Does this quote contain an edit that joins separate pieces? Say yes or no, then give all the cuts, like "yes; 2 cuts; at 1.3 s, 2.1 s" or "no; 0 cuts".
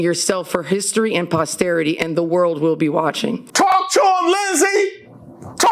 yes; 1 cut; at 3.4 s